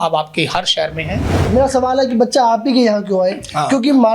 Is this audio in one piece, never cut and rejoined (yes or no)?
no